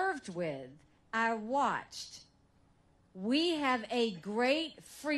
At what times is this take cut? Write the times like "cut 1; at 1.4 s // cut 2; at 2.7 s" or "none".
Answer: cut 1; at 1.9 s